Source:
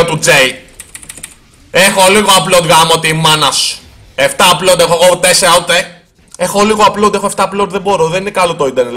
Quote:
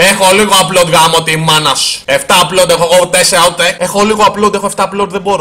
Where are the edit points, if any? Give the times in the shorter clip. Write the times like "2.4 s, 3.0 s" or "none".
1.9 s, 3.8 s